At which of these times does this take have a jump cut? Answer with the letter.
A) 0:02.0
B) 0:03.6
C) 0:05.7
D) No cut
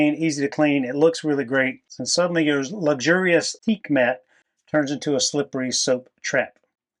A